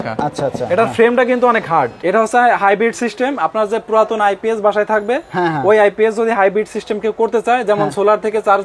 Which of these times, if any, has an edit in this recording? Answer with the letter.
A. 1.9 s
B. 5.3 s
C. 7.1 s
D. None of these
A